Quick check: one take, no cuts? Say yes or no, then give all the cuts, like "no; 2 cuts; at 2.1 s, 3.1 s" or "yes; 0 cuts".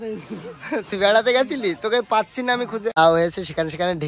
no; 1 cut; at 2.9 s